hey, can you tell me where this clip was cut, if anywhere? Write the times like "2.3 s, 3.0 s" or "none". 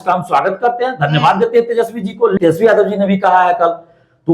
2.3 s